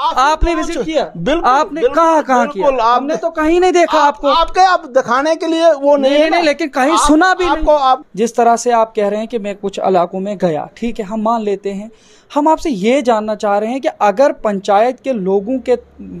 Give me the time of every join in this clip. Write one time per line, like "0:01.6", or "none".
0:08.0